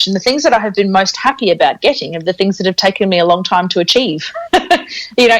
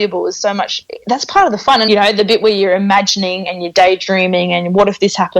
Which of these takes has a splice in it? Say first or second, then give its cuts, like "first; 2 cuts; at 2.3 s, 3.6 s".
second; 1 cut; at 1.9 s